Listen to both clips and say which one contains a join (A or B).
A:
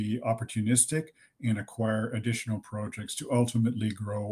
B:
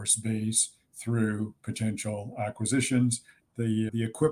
B